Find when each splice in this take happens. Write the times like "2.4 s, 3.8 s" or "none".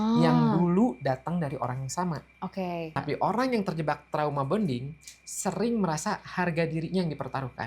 2.9 s